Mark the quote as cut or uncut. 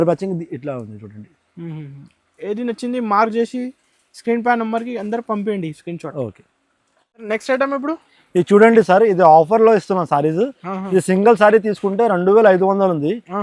uncut